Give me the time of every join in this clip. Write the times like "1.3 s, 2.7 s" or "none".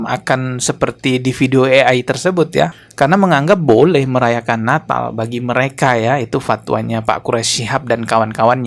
2.8 s